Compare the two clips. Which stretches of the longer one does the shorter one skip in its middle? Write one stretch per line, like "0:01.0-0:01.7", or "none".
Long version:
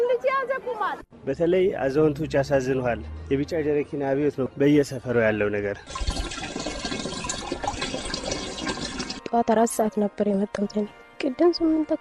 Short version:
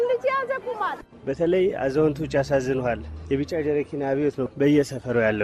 none